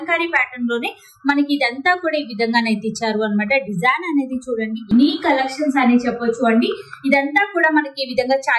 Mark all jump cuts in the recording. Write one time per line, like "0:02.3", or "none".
0:04.9